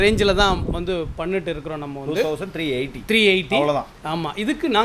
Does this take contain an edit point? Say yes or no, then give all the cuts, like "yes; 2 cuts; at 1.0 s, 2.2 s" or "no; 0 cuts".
no; 0 cuts